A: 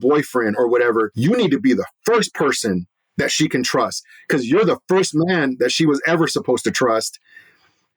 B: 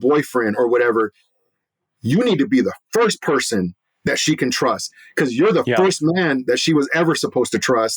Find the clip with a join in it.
A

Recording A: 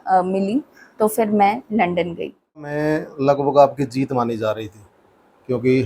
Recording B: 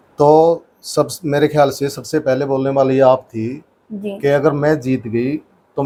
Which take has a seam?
A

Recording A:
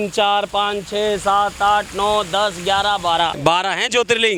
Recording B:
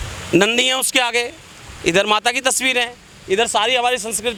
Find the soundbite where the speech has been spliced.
A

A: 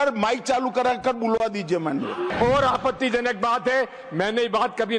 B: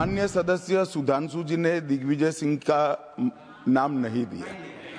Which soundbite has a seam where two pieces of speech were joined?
A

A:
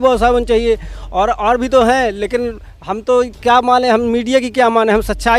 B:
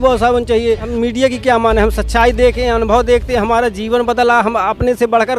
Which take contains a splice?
B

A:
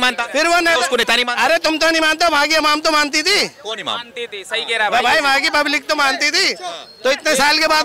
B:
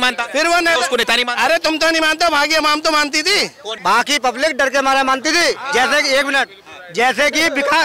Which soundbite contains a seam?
B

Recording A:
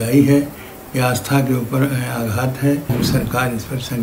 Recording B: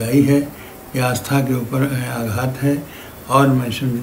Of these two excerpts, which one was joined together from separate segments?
A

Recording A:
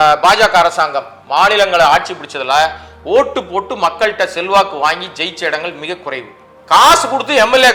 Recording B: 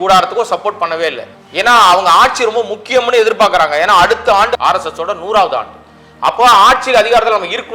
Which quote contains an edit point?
B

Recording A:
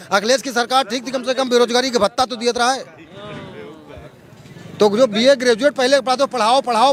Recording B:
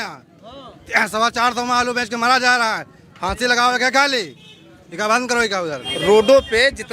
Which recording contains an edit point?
B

